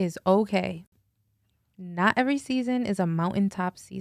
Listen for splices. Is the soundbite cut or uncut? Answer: uncut